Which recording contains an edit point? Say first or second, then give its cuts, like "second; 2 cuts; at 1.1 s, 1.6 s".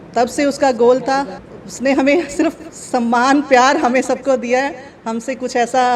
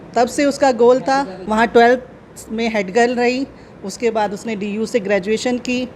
first; 1 cut; at 1.4 s